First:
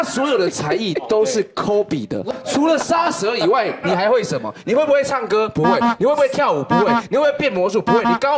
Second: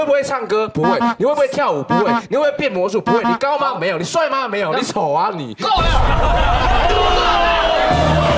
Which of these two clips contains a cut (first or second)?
first